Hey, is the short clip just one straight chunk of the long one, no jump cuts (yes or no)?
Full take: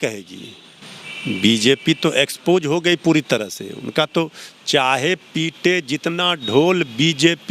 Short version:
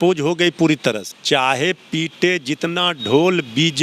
no